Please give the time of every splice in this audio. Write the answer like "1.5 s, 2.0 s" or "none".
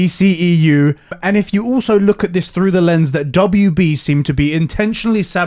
1.2 s